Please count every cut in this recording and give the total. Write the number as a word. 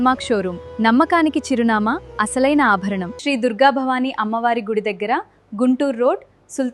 one